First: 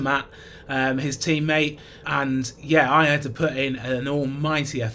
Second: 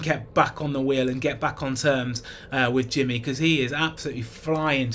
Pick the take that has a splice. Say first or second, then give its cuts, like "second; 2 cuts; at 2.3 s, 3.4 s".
first; 1 cut; at 2.0 s